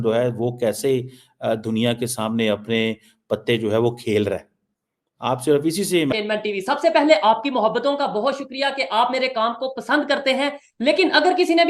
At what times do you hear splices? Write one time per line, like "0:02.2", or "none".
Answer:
0:06.1